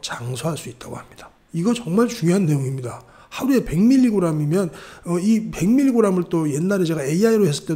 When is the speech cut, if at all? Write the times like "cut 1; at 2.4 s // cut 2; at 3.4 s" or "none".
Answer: none